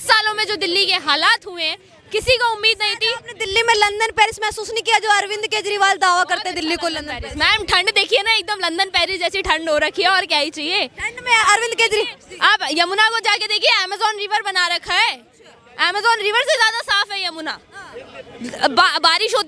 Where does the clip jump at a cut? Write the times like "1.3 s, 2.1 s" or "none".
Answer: none